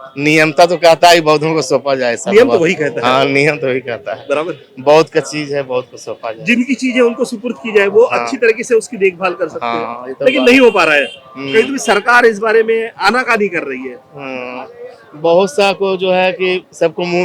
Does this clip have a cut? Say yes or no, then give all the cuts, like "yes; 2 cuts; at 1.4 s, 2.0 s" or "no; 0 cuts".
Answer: no; 0 cuts